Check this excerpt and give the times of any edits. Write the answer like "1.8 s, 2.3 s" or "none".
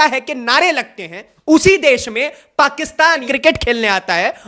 1.2 s, 3.2 s